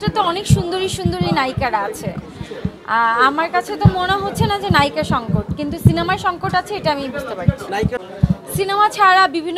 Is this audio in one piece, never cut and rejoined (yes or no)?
no